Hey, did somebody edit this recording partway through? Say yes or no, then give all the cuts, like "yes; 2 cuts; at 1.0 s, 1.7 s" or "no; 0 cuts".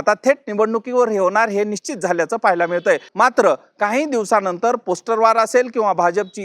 yes; 1 cut; at 3.1 s